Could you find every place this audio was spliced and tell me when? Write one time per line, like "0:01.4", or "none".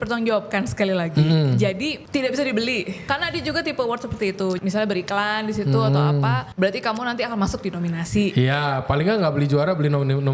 0:02.0
0:03.1
0:04.6
0:06.5